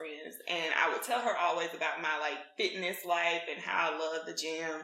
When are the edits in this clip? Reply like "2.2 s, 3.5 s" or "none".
none